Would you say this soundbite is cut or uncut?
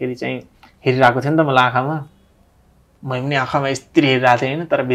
uncut